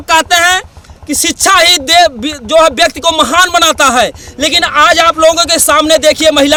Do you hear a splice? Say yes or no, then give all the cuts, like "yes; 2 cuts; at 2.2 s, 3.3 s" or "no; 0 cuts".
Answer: no; 0 cuts